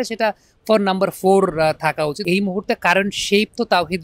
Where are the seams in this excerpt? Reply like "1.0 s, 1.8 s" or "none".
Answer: 2.2 s